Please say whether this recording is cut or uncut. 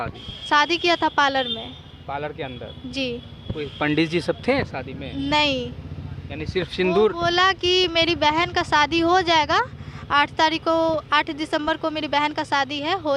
uncut